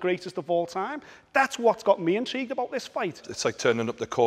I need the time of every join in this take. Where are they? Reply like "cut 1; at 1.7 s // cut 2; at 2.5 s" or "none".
cut 1; at 3.3 s